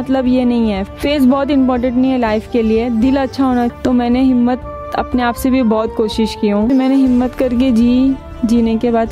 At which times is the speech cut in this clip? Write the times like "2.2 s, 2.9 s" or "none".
3.7 s, 6.7 s